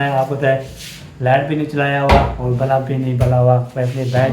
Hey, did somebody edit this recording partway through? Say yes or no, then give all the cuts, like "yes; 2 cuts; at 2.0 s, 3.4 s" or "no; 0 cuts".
no; 0 cuts